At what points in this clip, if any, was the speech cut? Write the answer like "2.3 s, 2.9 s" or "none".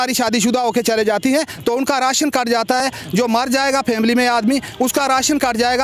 none